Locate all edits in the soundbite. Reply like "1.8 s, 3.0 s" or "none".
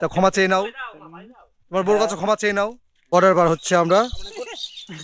3.1 s